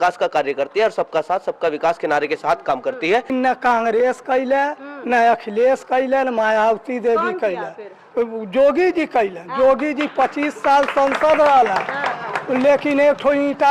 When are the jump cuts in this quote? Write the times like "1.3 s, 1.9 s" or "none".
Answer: 3.3 s